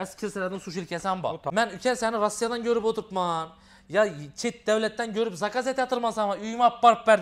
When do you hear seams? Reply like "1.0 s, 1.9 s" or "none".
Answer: 1.5 s